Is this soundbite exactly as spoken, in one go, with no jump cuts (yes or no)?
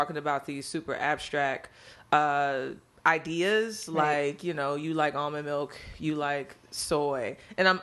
yes